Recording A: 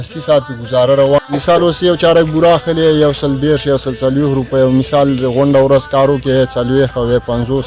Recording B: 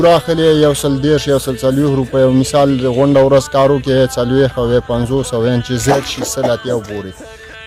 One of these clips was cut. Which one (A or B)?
A